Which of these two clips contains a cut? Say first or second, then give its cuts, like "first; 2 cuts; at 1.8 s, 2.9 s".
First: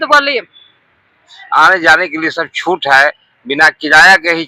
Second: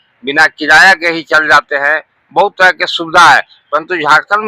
first; 1 cut; at 1.3 s